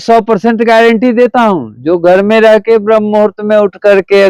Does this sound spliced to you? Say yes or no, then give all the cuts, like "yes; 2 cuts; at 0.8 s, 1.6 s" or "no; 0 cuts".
no; 0 cuts